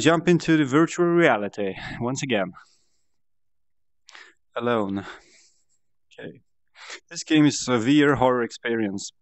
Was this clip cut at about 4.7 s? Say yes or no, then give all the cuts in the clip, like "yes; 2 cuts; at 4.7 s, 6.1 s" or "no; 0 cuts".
yes; 1 cut; at 4.7 s